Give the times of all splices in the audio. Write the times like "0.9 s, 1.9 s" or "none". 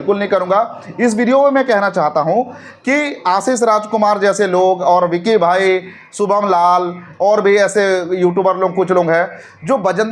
none